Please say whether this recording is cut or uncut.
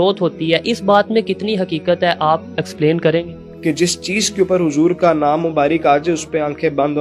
cut